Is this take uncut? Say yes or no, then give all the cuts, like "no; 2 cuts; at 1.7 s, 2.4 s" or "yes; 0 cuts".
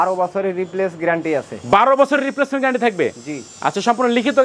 yes; 0 cuts